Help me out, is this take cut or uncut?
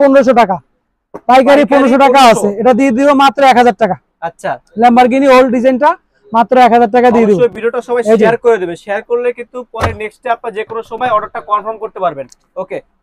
uncut